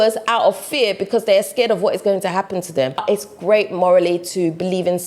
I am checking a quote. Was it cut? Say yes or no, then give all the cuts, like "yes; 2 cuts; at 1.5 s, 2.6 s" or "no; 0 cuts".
yes; 1 cut; at 3.0 s